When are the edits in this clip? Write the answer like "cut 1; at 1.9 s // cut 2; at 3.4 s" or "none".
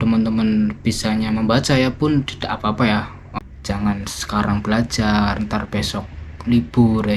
cut 1; at 3.2 s